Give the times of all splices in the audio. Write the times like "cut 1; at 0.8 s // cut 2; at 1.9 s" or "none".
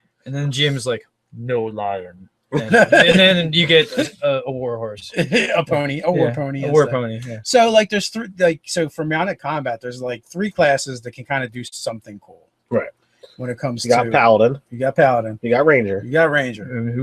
cut 1; at 9.4 s

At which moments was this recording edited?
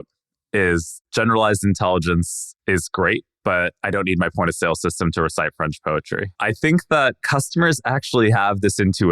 cut 1; at 6.3 s // cut 2; at 7.2 s

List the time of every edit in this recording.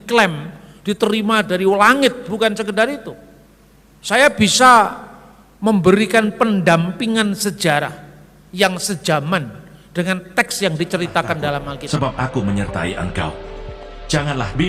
cut 1; at 11.8 s

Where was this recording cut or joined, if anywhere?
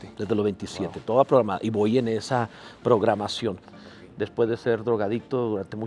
cut 1; at 3.6 s

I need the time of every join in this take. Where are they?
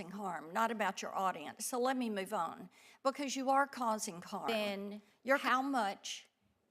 cut 1; at 4.5 s

